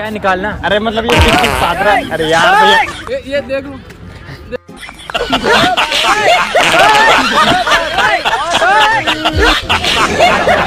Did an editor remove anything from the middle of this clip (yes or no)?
no